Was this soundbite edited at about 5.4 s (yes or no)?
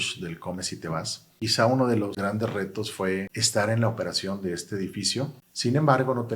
yes